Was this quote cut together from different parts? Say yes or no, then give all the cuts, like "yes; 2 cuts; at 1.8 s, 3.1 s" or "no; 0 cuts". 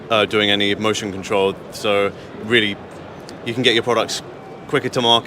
no; 0 cuts